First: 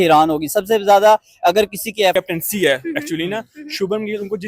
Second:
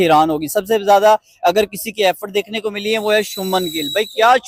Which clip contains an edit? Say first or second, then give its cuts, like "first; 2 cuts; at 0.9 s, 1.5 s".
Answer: first; 1 cut; at 2.1 s